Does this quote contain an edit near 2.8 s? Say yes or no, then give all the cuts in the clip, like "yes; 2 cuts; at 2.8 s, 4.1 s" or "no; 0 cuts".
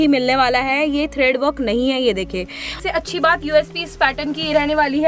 yes; 1 cut; at 2.8 s